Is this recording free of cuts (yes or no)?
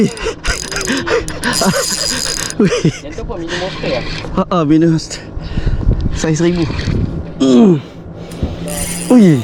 yes